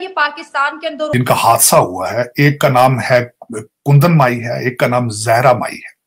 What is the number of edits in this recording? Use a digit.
1